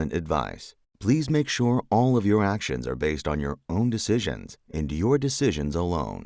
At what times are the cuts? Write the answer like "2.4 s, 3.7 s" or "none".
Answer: none